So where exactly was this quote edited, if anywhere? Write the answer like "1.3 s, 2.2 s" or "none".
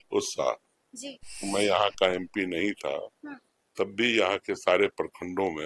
1.5 s